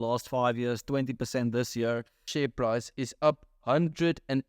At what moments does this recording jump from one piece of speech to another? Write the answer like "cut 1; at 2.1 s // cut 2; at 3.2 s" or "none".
cut 1; at 2.3 s